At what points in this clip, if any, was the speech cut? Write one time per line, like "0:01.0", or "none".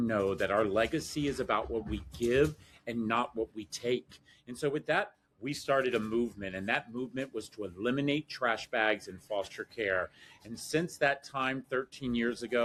none